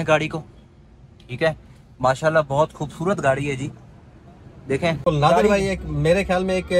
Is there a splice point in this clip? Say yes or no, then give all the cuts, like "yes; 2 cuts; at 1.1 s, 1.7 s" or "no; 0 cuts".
yes; 1 cut; at 5.0 s